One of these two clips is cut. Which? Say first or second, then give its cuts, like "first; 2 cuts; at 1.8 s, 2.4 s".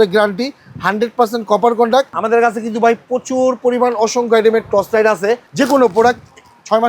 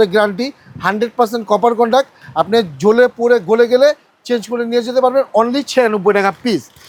first; 2 cuts; at 2.2 s, 5.5 s